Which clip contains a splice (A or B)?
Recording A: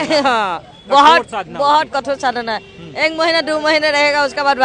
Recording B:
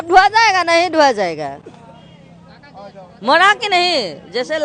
B